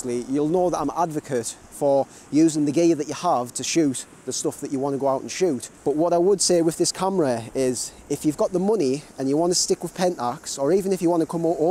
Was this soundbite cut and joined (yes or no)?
yes